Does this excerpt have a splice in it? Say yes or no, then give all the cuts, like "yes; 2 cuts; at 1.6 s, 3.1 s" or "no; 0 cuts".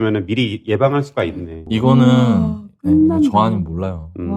yes; 1 cut; at 1.5 s